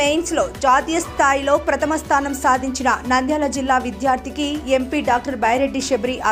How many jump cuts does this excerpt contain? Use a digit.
0